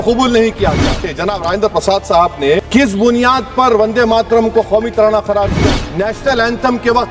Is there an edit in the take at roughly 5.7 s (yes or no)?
yes